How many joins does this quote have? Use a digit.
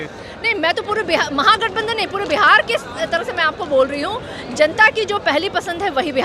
0